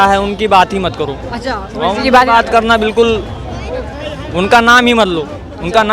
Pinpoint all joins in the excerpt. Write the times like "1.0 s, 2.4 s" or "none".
none

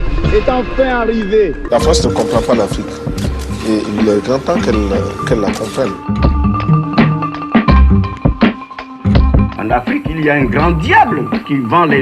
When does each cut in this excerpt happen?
none

